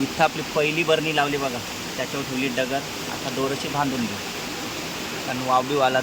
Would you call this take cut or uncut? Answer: uncut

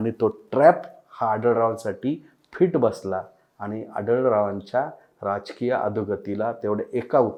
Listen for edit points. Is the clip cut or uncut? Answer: uncut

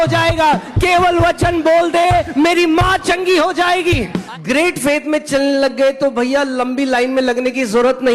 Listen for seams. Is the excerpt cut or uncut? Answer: cut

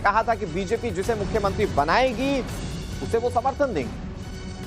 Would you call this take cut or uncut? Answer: cut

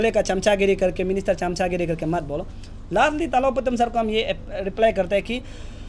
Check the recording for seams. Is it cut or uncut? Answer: uncut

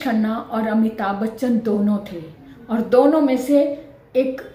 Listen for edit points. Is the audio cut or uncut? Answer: uncut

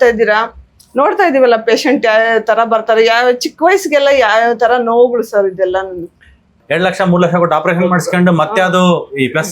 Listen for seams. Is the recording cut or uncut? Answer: cut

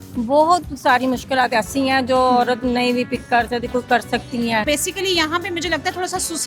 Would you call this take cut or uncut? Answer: cut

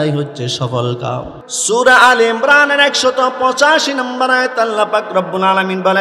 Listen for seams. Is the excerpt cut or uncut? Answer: cut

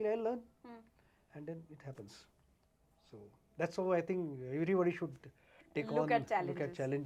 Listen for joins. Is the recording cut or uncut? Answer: uncut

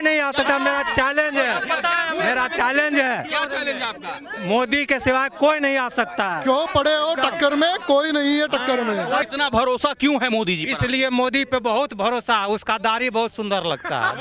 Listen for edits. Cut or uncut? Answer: cut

